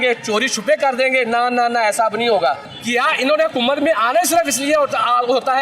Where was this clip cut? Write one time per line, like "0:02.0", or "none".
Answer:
0:02.7